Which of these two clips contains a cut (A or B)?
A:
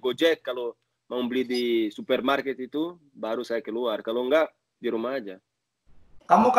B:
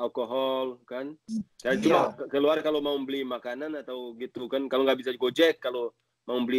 B